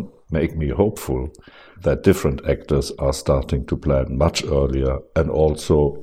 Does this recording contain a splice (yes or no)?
yes